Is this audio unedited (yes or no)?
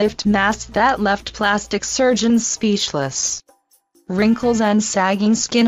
yes